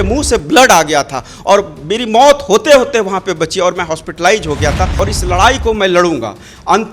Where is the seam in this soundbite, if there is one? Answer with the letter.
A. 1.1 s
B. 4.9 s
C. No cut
B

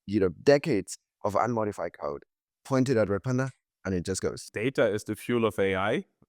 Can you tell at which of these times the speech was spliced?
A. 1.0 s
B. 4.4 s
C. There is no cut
B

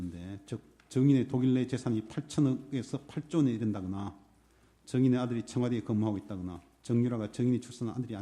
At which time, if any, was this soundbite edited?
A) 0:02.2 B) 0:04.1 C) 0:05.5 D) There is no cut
C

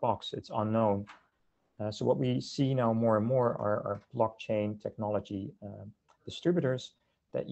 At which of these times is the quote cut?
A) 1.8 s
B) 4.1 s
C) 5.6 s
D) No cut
D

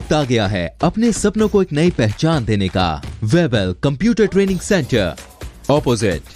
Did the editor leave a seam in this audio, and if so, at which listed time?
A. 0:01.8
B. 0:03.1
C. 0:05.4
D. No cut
B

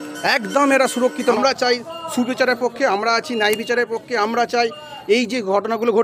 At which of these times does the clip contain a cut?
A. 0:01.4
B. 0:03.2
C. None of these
A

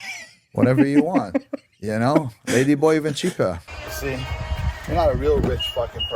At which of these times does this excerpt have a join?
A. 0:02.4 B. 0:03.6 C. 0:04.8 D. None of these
B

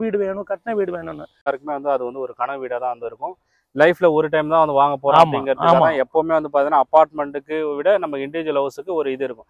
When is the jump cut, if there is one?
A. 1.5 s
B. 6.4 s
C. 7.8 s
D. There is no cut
A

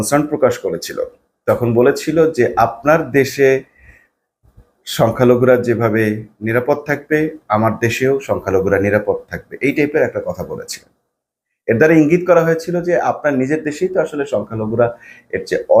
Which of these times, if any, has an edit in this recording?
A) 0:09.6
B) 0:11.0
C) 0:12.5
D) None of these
D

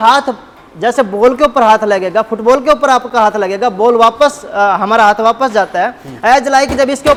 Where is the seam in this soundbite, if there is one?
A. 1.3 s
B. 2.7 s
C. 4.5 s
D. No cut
D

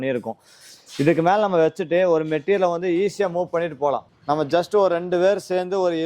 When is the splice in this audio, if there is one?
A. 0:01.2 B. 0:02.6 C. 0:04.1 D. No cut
C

